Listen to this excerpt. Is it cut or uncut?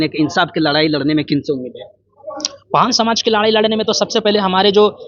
uncut